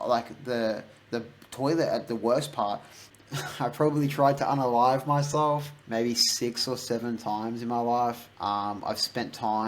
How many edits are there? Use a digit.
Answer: 3